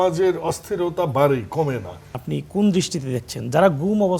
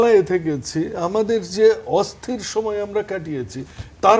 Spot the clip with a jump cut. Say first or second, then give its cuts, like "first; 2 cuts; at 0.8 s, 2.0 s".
first; 1 cut; at 2.2 s